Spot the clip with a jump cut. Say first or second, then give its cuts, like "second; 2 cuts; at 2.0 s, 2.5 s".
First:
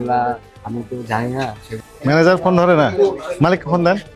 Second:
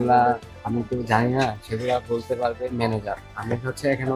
first; 1 cut; at 1.7 s